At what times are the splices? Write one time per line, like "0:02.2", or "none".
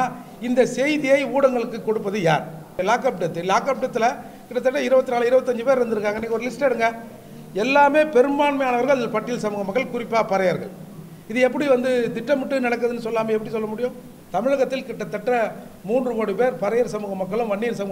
0:02.7
0:14.1